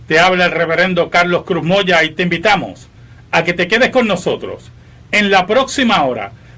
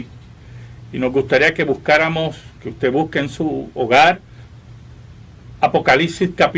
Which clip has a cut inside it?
second; 1 cut; at 2.4 s

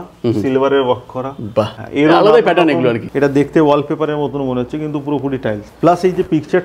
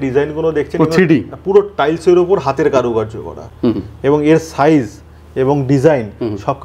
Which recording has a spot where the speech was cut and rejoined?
first; 3 cuts; at 1.8 s, 3.1 s, 5.7 s

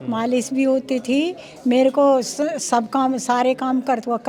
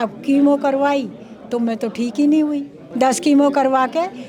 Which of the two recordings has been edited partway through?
second; 1 cut; at 2.8 s

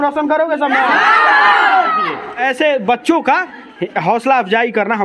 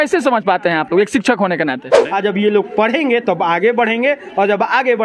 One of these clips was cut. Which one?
second; 1 cut; at 2.0 s

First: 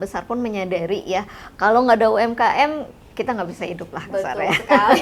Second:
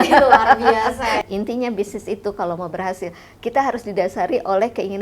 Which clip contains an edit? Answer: second; 1 cut; at 1.2 s

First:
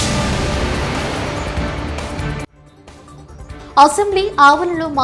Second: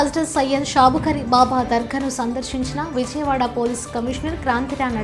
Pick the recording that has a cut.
first; 1 cut; at 3.6 s

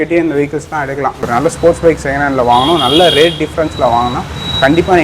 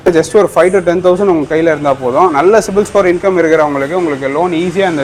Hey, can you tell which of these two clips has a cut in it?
first; 1 cut; at 1.2 s

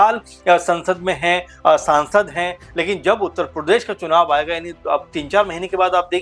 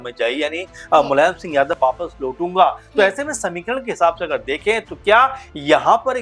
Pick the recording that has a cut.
second; 1 cut; at 1.8 s

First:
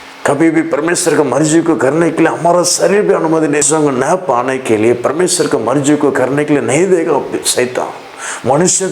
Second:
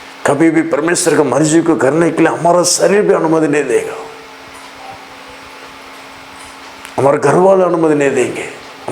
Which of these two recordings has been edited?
first; 1 cut; at 3.6 s

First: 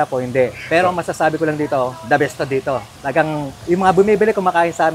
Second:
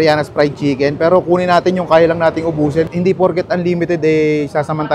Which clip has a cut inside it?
second; 1 cut; at 2.9 s

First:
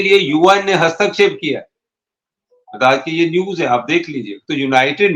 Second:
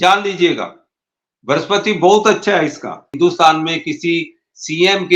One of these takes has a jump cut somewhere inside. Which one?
second; 1 cut; at 3.1 s

